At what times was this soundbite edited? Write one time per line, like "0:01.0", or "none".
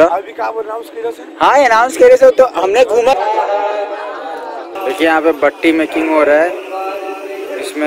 0:03.1